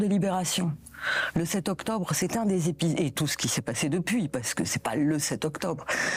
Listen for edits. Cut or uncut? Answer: uncut